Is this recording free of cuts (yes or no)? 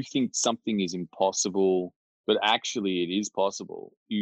yes